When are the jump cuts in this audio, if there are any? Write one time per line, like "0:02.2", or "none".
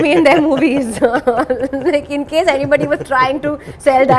none